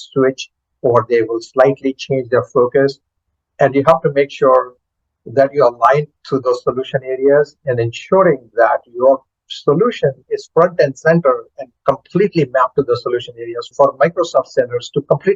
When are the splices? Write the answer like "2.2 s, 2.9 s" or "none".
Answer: 13.7 s